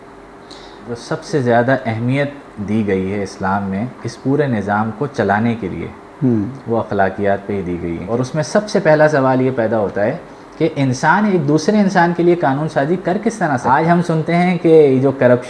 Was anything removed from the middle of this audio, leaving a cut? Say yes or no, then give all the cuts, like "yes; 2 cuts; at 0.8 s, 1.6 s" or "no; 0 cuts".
yes; 3 cuts; at 1.0 s, 8.0 s, 13.6 s